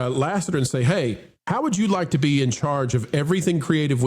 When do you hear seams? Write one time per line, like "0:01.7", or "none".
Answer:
0:01.3